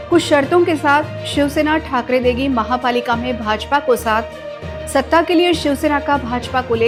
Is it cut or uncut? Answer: uncut